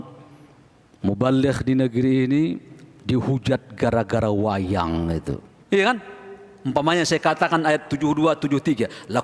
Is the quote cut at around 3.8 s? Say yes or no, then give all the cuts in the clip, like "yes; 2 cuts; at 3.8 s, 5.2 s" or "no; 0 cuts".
no; 1 cut; at 5.5 s